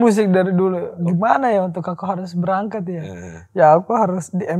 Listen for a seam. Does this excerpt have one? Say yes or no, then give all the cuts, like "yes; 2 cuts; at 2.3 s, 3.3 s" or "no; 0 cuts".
yes; 1 cut; at 0.9 s